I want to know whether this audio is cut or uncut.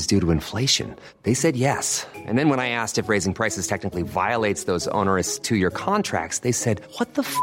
uncut